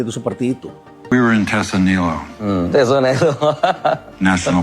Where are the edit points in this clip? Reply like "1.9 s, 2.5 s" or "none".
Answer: 1.1 s

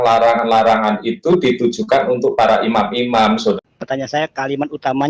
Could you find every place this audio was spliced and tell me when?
3.5 s

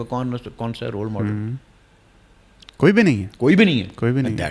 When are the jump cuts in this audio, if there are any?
none

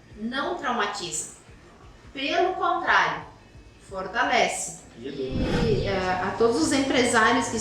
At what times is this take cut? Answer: 5.6 s

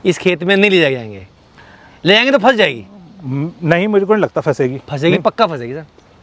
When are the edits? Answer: none

